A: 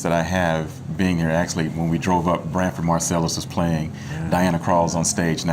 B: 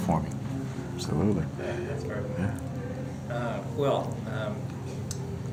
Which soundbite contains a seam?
A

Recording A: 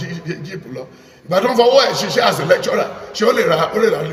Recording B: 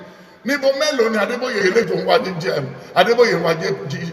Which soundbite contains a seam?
B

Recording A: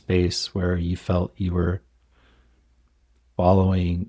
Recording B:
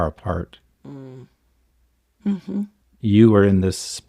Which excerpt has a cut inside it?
B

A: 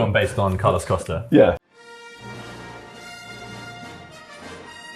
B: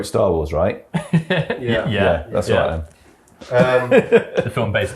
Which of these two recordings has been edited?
A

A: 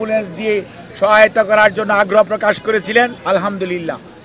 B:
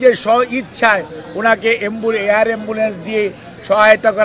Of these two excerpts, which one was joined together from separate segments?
A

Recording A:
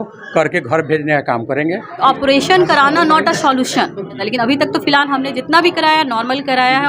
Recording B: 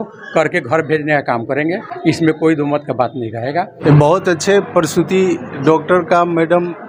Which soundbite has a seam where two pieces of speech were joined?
A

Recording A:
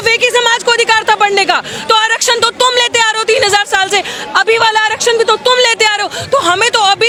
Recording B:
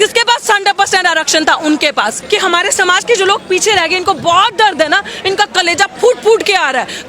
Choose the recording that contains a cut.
B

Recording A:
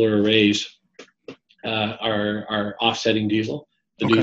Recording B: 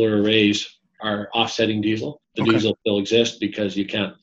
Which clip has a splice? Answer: B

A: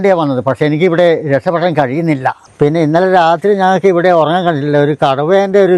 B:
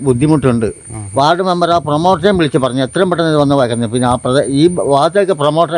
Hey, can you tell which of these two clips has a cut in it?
A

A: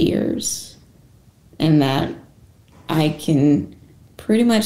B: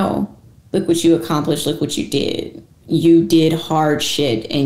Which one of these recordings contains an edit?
B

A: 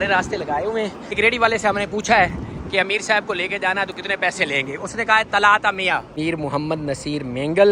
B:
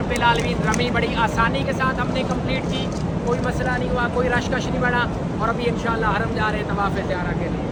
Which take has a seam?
A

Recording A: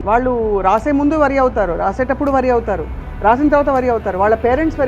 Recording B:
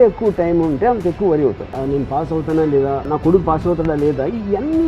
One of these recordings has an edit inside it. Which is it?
B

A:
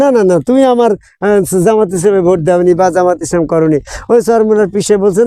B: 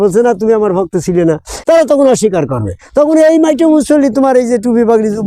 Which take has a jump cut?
B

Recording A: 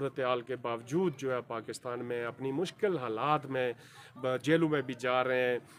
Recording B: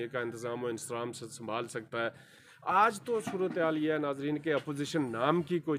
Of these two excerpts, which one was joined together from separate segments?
B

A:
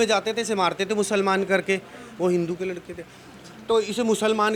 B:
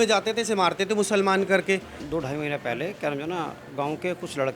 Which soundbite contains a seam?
B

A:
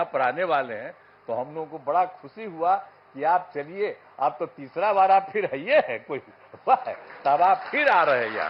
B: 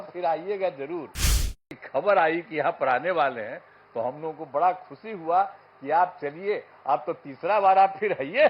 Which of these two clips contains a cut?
B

